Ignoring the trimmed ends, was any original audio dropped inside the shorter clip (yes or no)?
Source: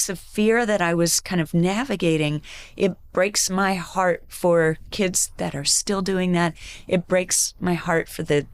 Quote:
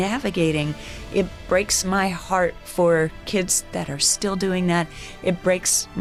no